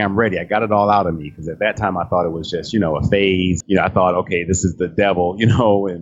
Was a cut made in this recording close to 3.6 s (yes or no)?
yes